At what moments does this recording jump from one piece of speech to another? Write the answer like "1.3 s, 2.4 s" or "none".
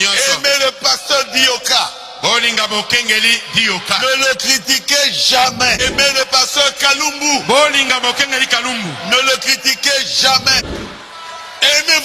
5.8 s, 10.6 s